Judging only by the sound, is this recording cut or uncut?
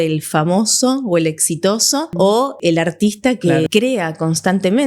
cut